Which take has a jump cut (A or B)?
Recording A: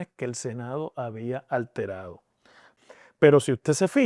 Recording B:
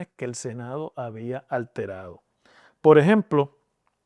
A